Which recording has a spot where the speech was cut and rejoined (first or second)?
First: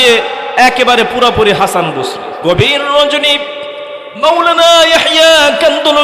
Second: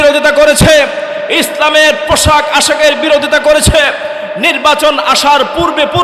first